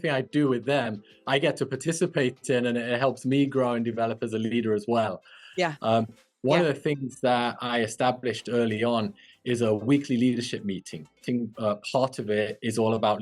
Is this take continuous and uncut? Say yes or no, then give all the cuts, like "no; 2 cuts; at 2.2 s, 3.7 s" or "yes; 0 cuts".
no; 2 cuts; at 6.2 s, 11.2 s